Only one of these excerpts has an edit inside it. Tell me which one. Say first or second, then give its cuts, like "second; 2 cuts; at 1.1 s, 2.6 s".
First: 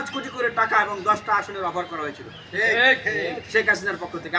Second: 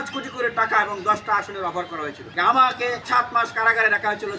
second; 2 cuts; at 2.3 s, 3.0 s